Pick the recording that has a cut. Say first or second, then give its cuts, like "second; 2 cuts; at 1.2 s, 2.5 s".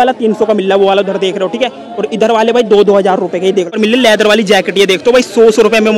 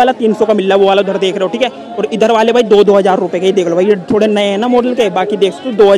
first; 1 cut; at 3.7 s